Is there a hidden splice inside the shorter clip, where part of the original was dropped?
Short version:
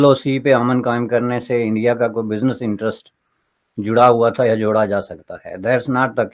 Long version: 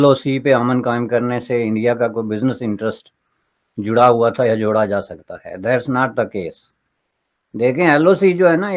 no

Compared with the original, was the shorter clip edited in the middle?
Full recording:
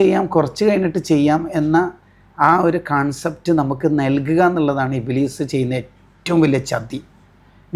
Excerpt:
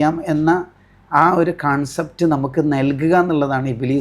no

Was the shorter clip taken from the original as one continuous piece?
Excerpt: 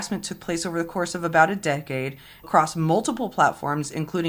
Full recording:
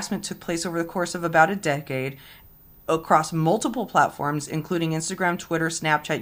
no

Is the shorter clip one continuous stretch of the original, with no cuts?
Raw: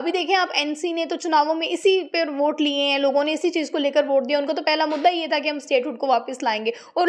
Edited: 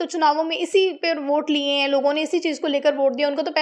yes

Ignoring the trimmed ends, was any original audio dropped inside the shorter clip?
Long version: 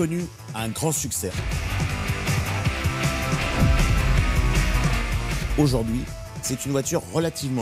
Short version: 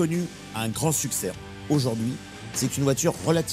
yes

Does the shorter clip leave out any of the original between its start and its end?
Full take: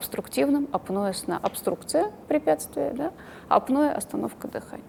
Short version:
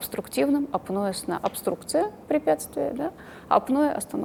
no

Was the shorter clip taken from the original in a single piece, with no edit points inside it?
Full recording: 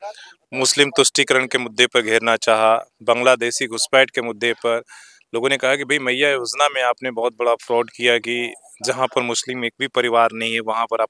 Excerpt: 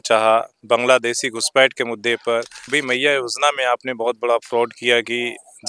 no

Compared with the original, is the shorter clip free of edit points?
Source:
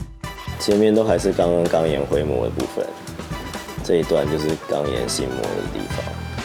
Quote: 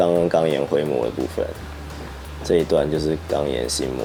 yes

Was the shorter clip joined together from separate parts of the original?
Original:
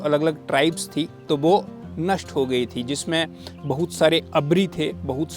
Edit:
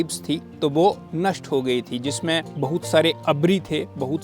yes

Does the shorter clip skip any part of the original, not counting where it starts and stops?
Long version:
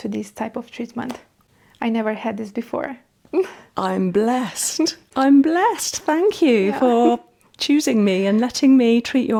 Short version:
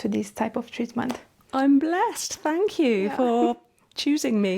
yes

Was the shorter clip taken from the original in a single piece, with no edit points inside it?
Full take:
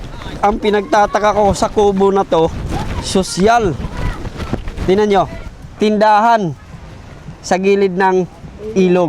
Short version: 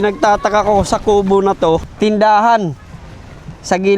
no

